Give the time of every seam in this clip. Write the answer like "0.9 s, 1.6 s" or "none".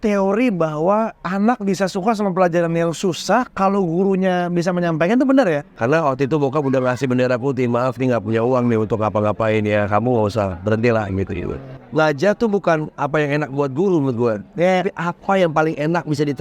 5.7 s, 11.7 s